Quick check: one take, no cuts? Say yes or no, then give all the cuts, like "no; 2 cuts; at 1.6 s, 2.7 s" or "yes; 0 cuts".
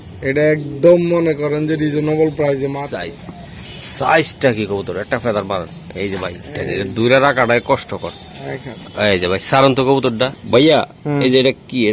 no; 1 cut; at 2.9 s